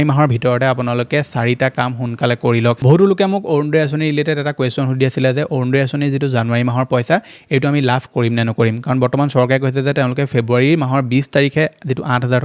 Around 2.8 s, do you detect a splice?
yes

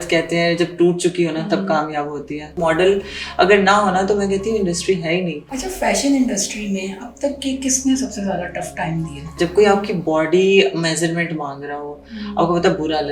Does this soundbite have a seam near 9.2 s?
yes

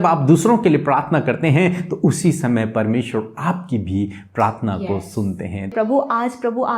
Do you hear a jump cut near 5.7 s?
yes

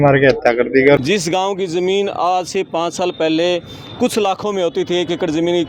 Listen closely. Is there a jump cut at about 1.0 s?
yes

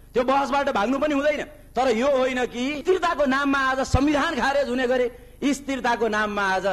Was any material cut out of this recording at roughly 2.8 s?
yes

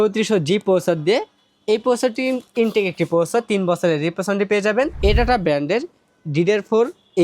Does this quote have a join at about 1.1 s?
no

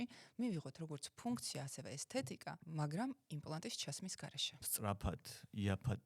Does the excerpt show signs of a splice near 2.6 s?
yes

